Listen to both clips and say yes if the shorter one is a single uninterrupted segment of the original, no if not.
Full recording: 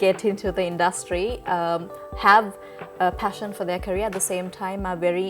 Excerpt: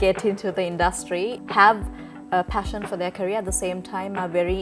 no